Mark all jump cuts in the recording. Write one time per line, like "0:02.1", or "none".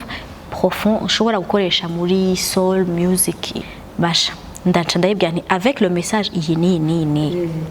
0:03.5